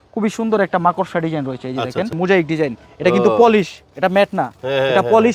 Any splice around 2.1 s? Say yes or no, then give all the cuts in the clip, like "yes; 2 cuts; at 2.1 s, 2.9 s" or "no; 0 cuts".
yes; 1 cut; at 2.1 s